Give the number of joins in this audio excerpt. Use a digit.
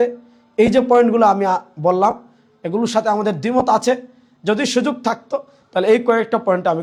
0